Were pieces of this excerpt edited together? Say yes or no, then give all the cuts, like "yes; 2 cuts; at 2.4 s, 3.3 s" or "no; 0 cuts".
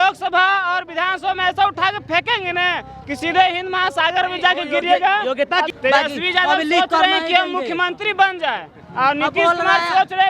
yes; 1 cut; at 5.7 s